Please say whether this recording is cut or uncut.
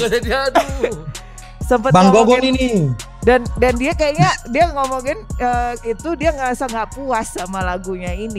uncut